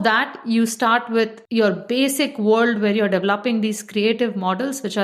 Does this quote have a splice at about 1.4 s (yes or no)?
yes